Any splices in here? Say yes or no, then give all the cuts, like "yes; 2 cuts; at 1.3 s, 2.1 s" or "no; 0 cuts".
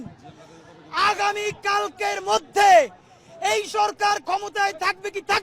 no; 0 cuts